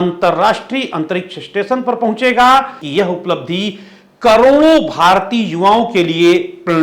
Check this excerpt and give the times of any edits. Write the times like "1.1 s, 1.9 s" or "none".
2.8 s